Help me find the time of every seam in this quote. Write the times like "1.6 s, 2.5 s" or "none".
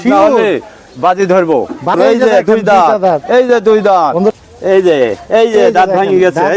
1.9 s, 4.3 s